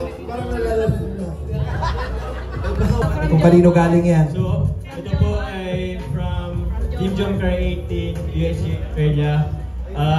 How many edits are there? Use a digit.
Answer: 1